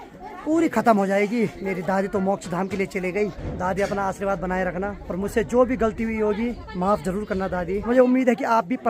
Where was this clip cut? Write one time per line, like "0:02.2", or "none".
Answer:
0:01.6
0:03.4
0:05.0
0:06.6
0:07.8

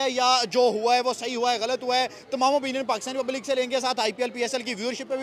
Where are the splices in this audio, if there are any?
none

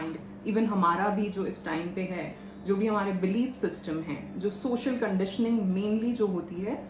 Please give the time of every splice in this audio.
none

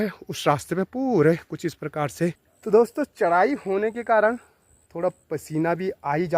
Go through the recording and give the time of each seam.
0:02.5

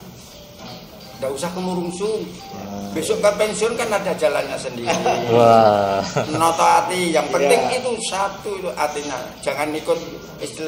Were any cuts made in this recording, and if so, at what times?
none

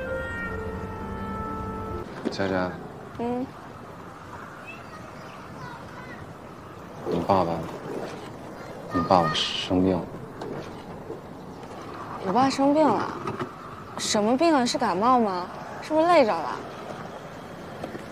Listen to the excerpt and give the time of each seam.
0:02.0

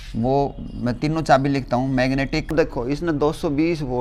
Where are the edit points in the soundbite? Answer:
0:02.5

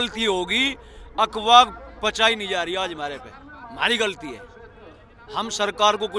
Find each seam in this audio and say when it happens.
none

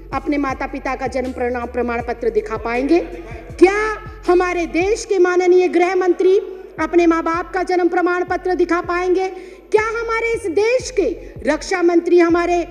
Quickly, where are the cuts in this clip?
none

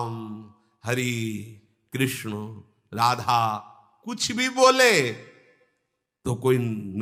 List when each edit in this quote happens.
none

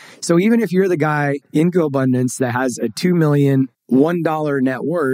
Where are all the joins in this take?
0:01.4
0:03.8

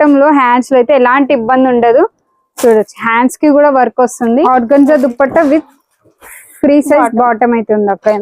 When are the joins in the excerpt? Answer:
0:04.5

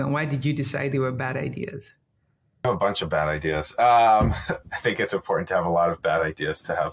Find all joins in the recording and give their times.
none

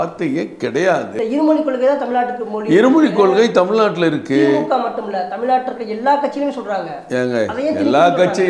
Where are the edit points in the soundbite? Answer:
0:01.1

